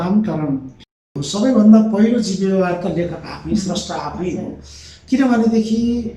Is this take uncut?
no; 1 cut; at 1.1 s

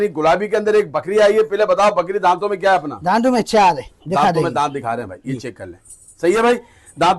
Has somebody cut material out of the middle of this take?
no; 0 cuts

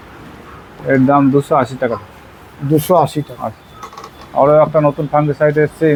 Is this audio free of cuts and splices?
yes; 0 cuts

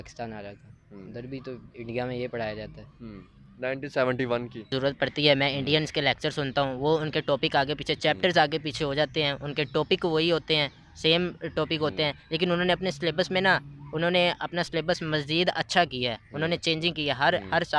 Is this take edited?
yes; 1 cut; at 4.7 s

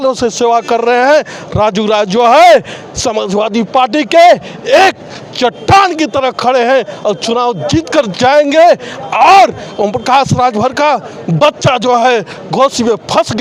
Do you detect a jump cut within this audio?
no; 0 cuts

